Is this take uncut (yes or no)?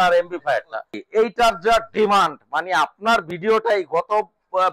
no